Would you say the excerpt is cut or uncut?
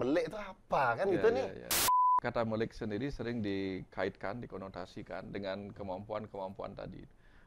cut